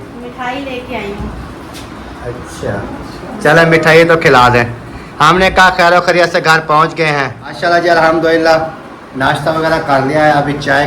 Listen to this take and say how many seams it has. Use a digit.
1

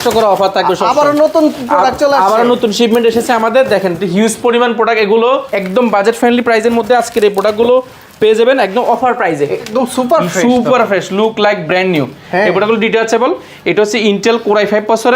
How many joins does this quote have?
2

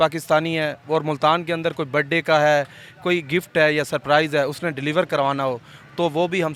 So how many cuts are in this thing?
0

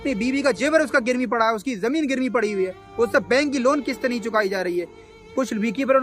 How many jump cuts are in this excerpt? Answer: 1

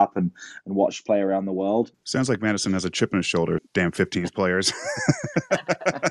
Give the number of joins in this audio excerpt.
2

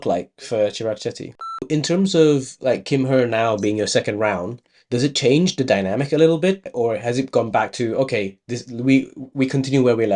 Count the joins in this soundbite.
2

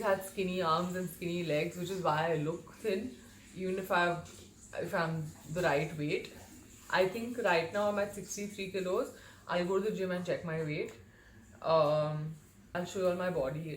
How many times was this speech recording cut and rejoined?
1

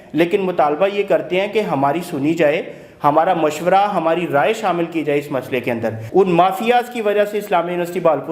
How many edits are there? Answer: 1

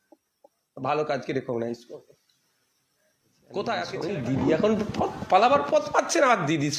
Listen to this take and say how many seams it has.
1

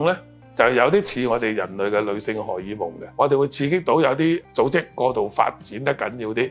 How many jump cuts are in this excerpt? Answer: 2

